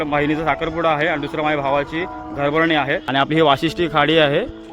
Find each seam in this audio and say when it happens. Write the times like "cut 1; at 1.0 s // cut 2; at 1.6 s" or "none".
cut 1; at 3.0 s